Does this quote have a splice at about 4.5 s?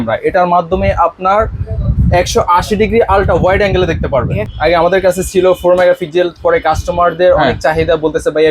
yes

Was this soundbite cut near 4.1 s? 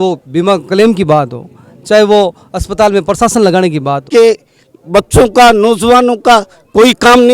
yes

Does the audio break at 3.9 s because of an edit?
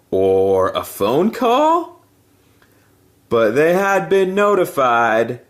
yes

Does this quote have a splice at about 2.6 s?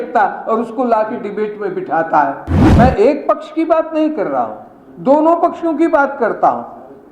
yes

